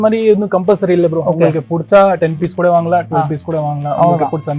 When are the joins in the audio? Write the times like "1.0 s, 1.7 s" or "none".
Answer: none